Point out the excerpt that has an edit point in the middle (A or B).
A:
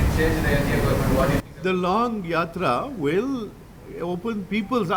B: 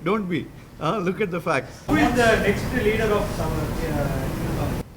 B